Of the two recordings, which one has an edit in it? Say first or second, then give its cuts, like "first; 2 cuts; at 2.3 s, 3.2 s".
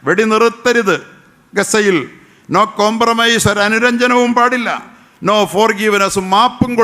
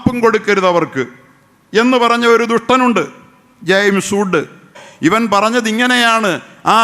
second; 1 cut; at 4.8 s